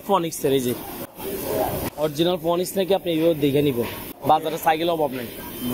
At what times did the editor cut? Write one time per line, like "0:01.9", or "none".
none